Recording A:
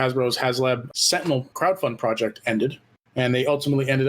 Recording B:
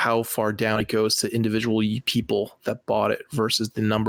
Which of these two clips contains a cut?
A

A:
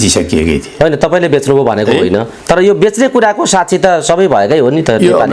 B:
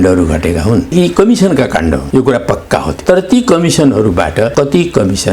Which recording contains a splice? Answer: B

